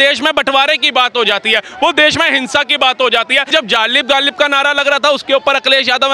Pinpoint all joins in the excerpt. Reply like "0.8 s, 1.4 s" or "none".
3.5 s